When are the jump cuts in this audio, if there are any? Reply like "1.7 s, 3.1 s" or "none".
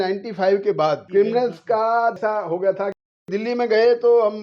1.0 s, 2.2 s, 3.3 s